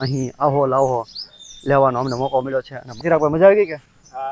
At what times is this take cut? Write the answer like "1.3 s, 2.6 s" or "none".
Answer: 3.0 s